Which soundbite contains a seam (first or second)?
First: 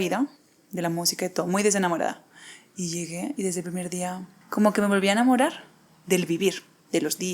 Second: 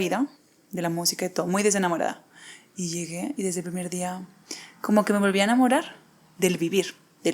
first